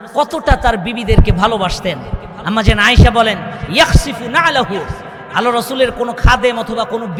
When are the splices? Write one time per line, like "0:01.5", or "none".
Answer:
none